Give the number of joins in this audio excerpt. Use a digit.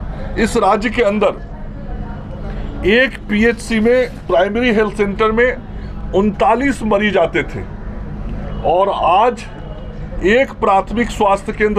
0